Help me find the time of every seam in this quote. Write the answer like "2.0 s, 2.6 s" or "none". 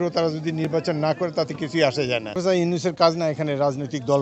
2.4 s